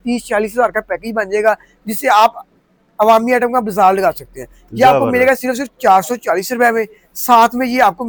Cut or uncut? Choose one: uncut